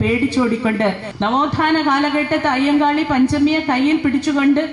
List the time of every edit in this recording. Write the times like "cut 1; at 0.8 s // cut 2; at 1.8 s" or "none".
cut 1; at 1.1 s